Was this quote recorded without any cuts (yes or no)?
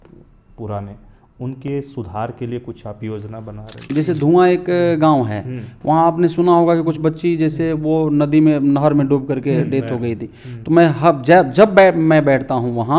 no